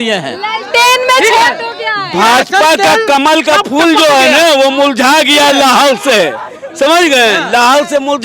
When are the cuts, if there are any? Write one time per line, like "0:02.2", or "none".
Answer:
none